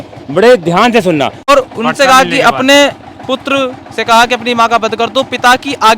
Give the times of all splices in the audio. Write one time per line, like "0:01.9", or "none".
0:01.4